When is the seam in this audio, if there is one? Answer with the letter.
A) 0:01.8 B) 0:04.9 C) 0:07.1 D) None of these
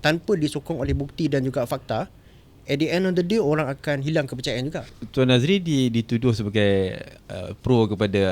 B